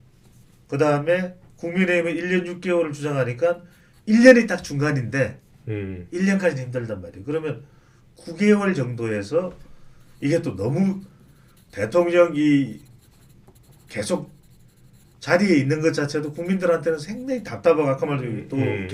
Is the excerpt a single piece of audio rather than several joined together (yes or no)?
yes